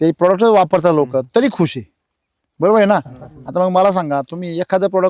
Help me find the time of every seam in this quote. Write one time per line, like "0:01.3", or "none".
none